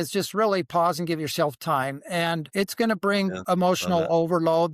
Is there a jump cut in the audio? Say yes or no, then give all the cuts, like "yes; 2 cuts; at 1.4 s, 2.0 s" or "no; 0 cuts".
yes; 1 cut; at 3.4 s